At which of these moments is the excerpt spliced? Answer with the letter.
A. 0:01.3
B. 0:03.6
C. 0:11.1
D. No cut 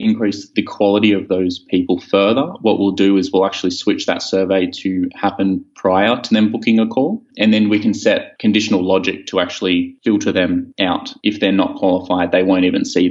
C